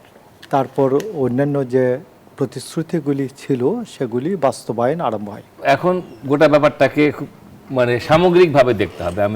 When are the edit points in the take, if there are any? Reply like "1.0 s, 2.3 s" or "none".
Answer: 5.5 s